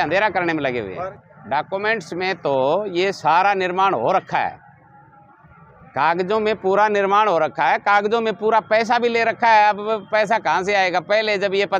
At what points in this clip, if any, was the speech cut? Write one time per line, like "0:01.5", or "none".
0:01.2